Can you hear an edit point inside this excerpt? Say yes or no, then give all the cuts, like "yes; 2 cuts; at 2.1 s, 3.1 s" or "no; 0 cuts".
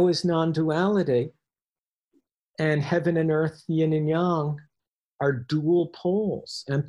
no; 0 cuts